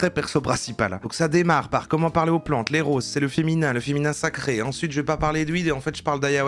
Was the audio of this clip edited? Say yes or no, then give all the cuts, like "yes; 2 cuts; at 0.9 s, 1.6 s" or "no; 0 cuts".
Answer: yes; 1 cut; at 1.0 s